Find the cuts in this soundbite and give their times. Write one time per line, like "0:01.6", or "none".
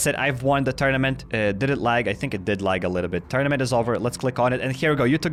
none